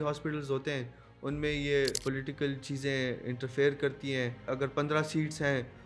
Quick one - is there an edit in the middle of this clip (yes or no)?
yes